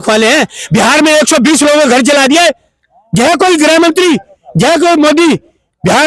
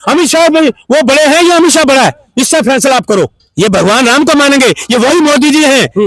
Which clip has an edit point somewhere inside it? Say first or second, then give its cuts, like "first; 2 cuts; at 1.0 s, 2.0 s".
second; 1 cut; at 3.4 s